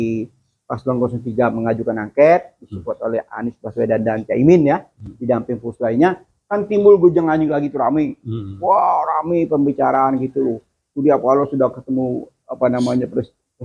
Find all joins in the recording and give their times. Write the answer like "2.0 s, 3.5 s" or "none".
none